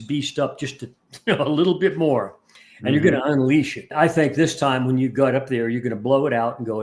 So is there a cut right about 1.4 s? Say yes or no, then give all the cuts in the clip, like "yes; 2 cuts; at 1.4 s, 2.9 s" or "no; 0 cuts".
no; 1 cut; at 3.8 s